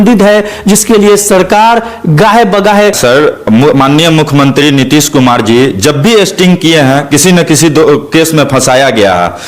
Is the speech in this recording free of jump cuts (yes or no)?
no